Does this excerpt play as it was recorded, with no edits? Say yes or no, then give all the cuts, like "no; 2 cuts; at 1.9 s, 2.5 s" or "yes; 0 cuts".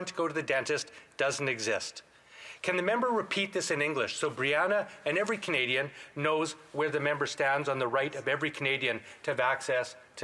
yes; 0 cuts